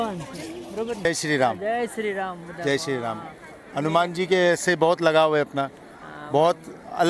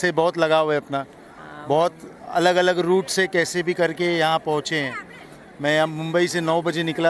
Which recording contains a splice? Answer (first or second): first